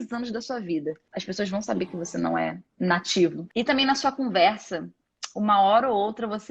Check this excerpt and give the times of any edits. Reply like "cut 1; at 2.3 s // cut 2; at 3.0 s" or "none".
cut 1; at 1.1 s // cut 2; at 2.6 s // cut 3; at 3.4 s

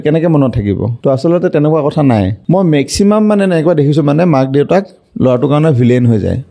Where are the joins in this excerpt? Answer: cut 1; at 0.9 s // cut 2; at 2.4 s

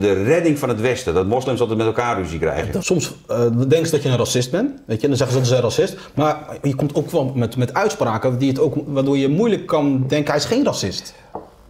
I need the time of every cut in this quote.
cut 1; at 2.8 s

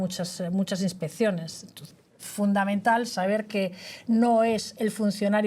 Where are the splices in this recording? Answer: cut 1; at 1.8 s

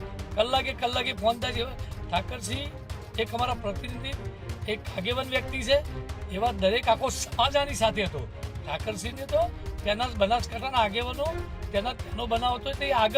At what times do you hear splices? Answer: none

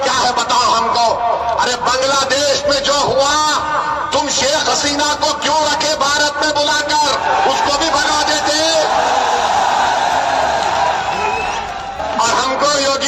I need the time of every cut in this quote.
cut 1; at 12.0 s

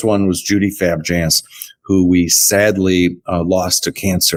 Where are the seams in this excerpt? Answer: none

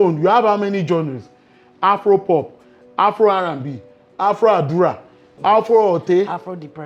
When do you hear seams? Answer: none

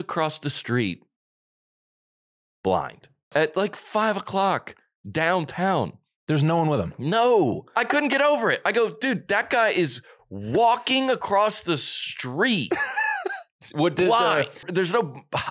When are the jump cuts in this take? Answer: cut 1; at 3.3 s // cut 2; at 7.7 s // cut 3; at 14.6 s

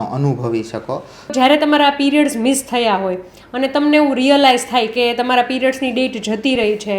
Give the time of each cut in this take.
cut 1; at 1.3 s

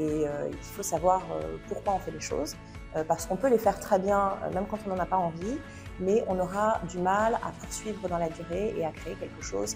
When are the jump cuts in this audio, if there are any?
none

